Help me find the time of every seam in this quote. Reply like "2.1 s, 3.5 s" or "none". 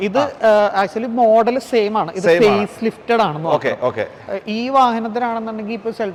none